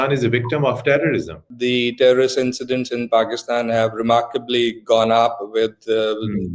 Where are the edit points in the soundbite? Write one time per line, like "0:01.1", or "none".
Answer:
0:01.4